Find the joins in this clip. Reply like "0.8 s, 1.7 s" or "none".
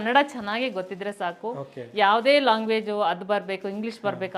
none